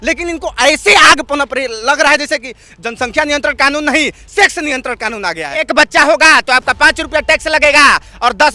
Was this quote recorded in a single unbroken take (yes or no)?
no